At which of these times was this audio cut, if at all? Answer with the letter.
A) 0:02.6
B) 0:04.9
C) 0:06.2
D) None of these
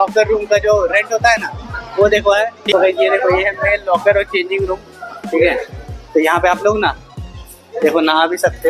A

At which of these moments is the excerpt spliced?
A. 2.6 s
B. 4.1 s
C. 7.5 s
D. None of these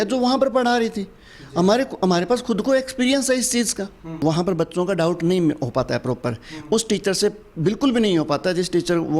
B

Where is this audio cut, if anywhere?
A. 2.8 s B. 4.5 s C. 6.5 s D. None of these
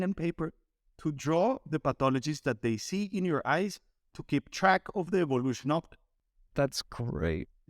C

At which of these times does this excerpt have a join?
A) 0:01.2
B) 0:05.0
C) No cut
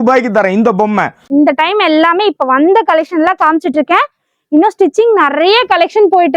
A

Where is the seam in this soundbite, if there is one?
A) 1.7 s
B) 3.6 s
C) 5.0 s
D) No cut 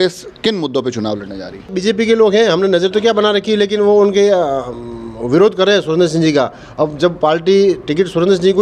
A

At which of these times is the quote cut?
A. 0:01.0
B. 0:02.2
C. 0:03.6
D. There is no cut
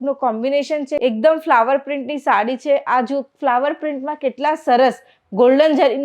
A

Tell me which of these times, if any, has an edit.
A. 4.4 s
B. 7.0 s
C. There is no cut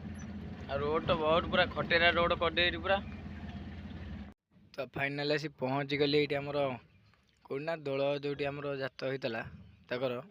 A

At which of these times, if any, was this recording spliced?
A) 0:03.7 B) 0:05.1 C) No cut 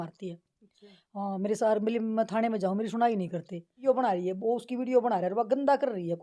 A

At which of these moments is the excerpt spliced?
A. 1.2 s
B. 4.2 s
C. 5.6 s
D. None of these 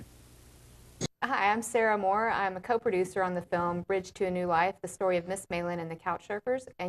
A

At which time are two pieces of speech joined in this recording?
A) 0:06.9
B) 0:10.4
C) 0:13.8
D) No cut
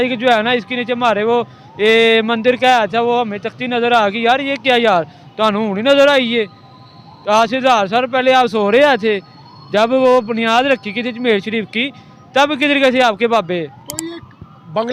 D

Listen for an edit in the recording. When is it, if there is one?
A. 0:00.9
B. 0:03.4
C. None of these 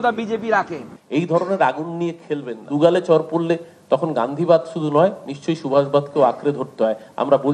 A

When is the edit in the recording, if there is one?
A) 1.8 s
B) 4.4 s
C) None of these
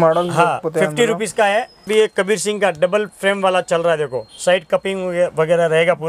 A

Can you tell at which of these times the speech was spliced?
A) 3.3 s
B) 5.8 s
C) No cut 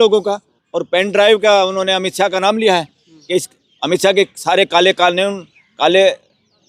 C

